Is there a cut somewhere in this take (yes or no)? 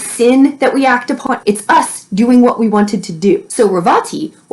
yes